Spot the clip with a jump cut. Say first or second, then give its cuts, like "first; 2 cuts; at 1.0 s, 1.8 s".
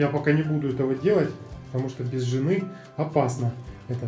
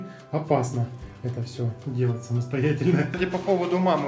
second; 1 cut; at 3.1 s